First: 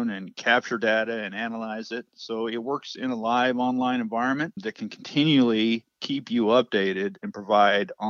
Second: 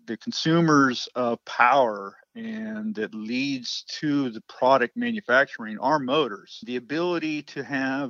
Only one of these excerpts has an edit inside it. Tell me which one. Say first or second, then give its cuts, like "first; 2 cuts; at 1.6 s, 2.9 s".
second; 1 cut; at 6.6 s